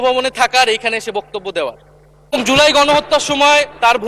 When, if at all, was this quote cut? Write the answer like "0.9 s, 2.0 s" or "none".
2.3 s